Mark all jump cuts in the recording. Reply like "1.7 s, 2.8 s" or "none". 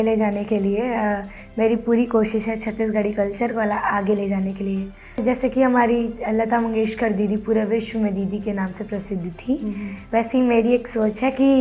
5.2 s